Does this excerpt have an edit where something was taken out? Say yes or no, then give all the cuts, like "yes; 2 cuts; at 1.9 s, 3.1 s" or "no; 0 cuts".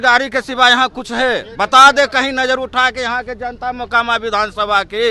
no; 0 cuts